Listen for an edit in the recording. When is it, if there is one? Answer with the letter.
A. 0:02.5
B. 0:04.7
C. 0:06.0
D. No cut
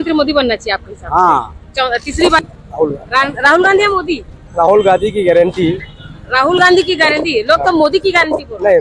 A